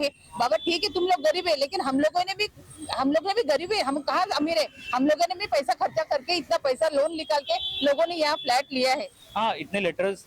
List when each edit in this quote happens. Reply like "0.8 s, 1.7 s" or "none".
9.2 s